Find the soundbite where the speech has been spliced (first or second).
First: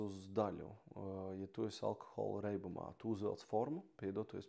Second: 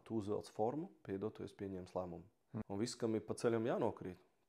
second